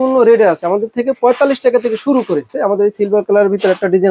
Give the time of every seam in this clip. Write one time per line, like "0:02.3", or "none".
0:02.5